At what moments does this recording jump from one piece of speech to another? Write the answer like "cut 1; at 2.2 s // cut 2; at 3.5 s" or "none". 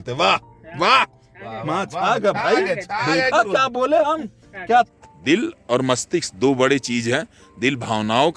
cut 1; at 4.9 s